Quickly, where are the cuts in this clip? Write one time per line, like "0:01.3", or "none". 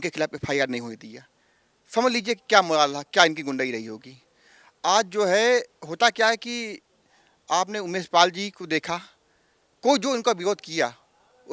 none